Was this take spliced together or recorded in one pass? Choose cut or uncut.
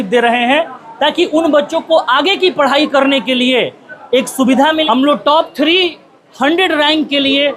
cut